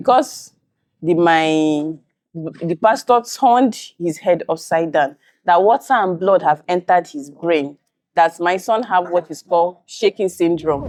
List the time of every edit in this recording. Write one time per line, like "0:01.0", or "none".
none